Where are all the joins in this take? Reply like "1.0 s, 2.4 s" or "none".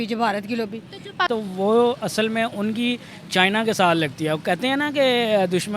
1.3 s